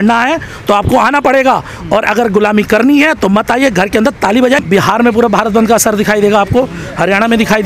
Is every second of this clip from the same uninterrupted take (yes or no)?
no